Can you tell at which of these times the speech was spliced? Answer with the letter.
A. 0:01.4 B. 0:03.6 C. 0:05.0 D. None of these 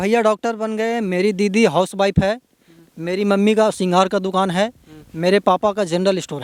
D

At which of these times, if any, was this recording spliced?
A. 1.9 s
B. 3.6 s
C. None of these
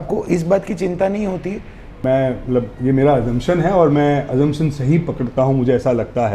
A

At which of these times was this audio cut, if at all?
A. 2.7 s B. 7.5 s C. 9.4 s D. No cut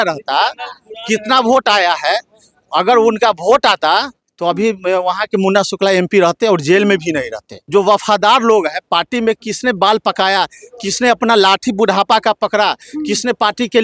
B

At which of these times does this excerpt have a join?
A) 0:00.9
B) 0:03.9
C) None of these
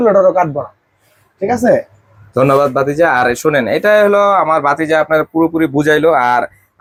C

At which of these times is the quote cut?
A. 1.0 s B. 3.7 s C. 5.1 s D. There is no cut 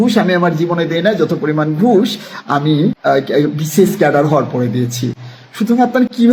D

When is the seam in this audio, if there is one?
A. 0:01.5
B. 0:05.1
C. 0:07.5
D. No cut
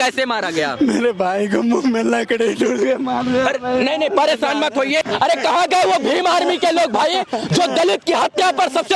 B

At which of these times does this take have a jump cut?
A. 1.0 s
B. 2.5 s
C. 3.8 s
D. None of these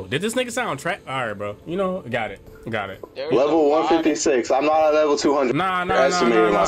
B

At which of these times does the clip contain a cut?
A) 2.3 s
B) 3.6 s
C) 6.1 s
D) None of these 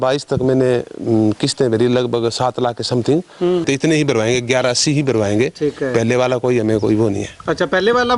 B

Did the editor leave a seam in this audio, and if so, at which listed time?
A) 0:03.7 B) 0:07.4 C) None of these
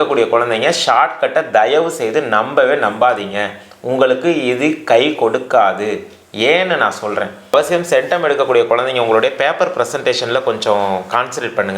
B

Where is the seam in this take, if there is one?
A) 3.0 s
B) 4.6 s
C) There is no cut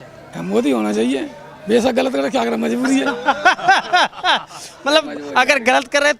C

